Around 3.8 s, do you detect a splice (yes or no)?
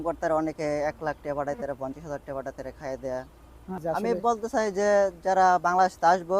yes